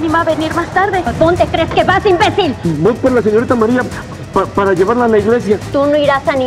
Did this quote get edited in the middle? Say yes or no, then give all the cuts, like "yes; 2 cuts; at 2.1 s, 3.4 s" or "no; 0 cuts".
yes; 2 cuts; at 1.1 s, 2.6 s